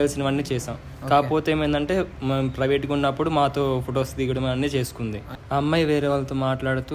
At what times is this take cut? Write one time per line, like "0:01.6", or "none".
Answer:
0:05.3